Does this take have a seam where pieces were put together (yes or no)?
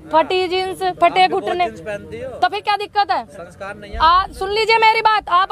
no